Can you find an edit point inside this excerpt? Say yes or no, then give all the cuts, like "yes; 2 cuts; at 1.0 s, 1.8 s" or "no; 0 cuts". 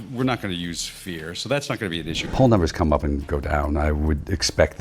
yes; 1 cut; at 2.2 s